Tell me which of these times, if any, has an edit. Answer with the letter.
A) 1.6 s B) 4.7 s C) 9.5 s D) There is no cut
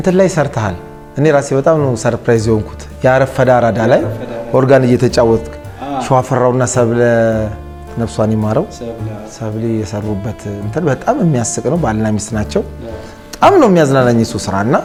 D